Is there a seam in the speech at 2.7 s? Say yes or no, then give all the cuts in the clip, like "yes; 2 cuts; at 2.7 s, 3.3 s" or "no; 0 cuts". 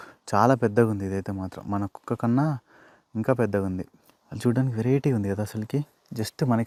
no; 0 cuts